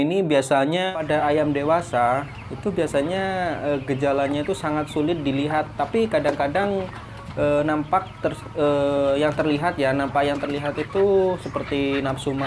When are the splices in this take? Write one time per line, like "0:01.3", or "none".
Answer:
0:01.0